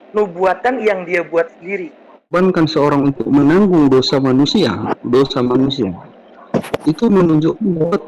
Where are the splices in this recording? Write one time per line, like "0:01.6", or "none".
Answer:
0:02.3